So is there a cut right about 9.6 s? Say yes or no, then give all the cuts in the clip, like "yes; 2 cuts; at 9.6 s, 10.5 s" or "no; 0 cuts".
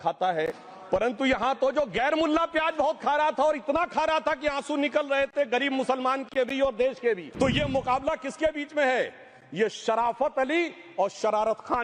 no; 1 cut; at 7.3 s